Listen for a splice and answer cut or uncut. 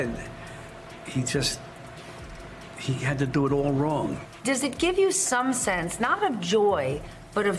cut